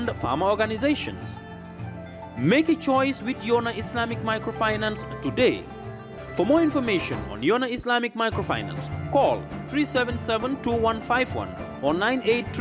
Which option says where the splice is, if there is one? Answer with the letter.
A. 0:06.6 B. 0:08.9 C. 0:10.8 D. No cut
D